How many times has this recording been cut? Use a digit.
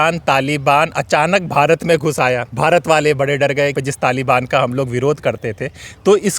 2